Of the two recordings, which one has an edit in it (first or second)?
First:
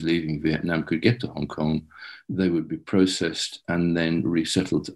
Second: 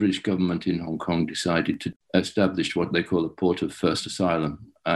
second